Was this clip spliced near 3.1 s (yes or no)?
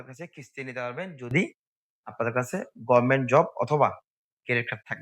no